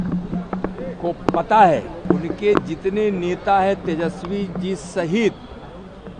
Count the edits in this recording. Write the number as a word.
one